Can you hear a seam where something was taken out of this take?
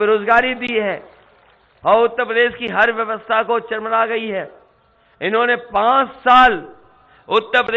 no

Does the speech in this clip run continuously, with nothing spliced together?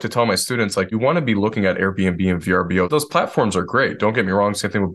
no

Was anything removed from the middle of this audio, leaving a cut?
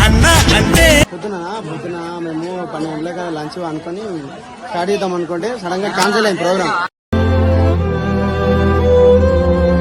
yes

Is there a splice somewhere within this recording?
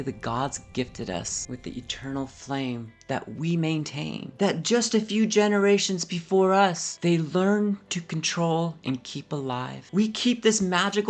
no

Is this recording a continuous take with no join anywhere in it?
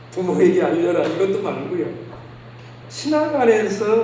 no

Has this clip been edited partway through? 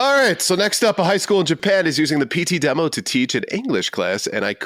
no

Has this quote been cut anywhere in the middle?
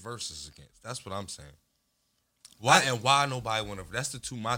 no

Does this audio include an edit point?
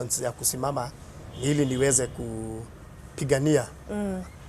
no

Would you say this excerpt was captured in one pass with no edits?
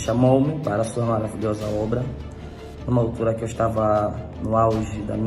yes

